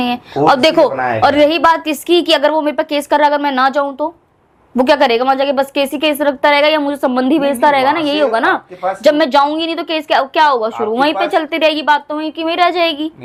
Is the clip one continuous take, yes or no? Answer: yes